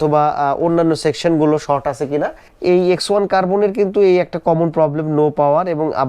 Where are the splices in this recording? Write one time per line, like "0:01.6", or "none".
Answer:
0:02.4